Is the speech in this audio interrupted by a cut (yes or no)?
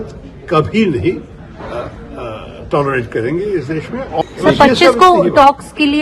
yes